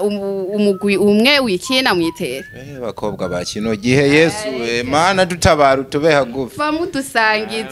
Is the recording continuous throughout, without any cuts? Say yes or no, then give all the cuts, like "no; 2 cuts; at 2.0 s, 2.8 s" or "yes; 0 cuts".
yes; 0 cuts